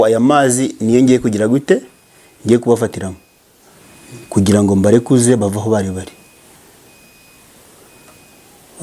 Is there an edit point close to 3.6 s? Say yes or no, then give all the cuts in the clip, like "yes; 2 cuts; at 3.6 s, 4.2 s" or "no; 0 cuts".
no; 0 cuts